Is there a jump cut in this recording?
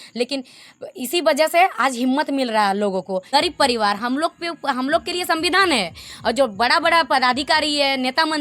yes; 1 cut; at 3.2 s

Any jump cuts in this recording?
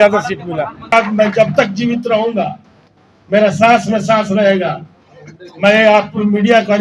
yes; 1 cut; at 0.9 s

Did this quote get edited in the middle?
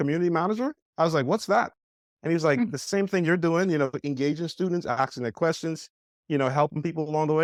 no; 0 cuts

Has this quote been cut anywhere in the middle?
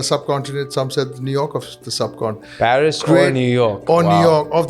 yes; 1 cut; at 2.4 s

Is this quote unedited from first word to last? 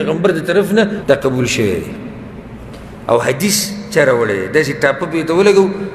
no; 1 cut; at 1.0 s

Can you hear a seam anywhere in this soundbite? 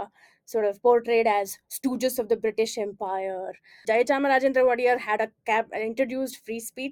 yes; 1 cut; at 3.8 s

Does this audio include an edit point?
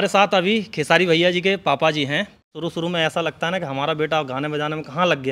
yes; 1 cut; at 2.5 s

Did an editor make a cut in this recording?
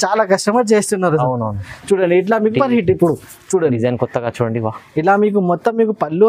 yes; 1 cut; at 2.5 s

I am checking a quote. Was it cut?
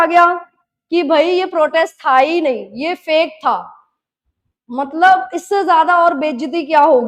no; 0 cuts

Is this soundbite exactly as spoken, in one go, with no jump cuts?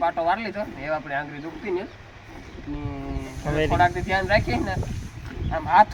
yes; 0 cuts

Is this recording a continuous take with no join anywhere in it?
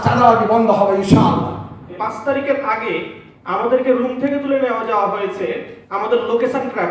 no; 1 cut; at 1.9 s

